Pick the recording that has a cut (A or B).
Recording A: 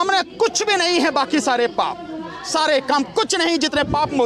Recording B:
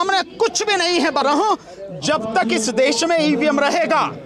B